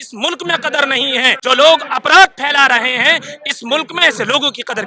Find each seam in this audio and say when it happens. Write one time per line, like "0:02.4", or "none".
0:01.4